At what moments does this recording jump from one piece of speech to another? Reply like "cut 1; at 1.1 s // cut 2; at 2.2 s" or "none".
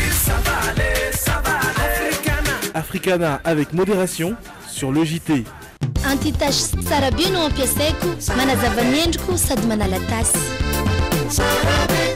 cut 1; at 5.8 s